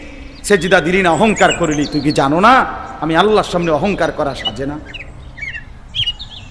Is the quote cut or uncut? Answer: cut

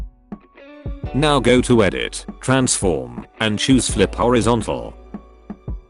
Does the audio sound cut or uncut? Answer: cut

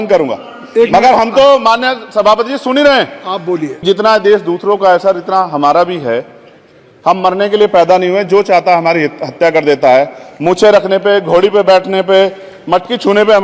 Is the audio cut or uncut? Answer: cut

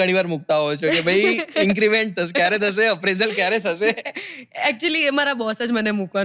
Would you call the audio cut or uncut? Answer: uncut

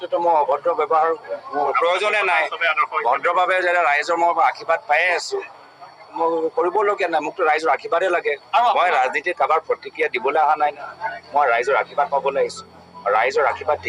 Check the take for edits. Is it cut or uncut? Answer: cut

